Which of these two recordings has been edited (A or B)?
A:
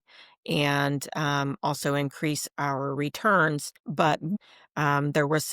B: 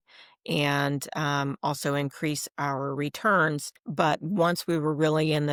A